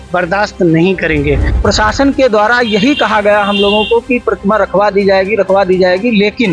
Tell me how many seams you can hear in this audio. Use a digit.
1